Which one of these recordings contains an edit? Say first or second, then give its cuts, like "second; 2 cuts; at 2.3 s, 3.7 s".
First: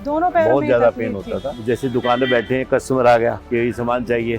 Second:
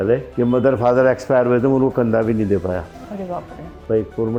first; 2 cuts; at 1.5 s, 3.4 s